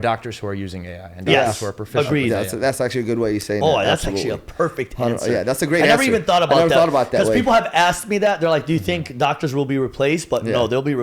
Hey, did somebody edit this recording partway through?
no; 0 cuts

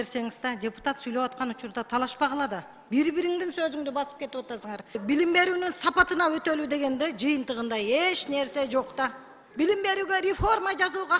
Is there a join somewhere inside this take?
yes; 2 cuts; at 5.0 s, 9.4 s

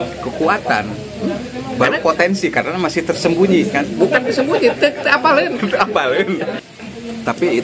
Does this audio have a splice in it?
yes; 1 cut; at 6.5 s

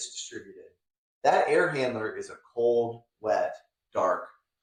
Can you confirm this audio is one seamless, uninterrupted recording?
yes; 0 cuts

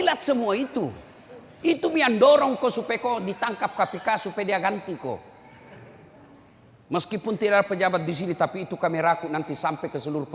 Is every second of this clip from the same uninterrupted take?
yes; 0 cuts

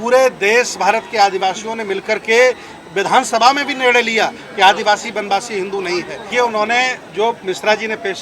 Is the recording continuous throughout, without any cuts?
no; 1 cut; at 6.3 s

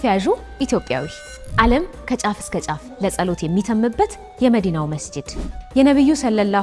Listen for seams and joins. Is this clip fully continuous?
yes; 0 cuts

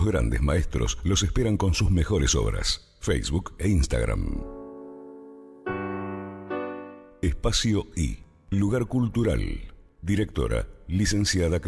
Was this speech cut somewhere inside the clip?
no; 0 cuts

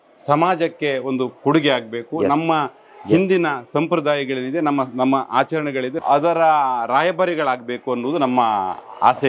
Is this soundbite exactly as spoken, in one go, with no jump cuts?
yes; 0 cuts

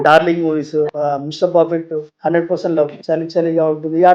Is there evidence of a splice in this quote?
yes; 3 cuts; at 0.9 s, 2.1 s, 3.0 s

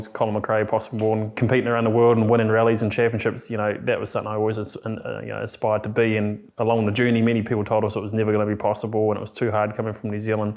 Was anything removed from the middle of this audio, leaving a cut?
yes; 2 cuts; at 1.4 s, 6.4 s

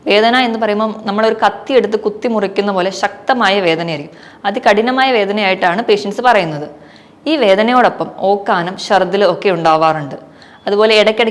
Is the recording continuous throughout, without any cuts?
yes; 0 cuts

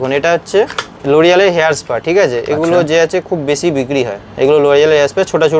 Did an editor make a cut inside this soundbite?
no; 0 cuts

